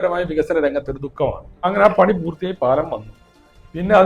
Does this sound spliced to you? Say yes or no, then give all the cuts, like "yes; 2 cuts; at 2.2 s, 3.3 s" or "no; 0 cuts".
yes; 1 cut; at 1.6 s